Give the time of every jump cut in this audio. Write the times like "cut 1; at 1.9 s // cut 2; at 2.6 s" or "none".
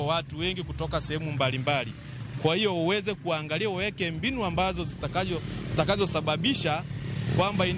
none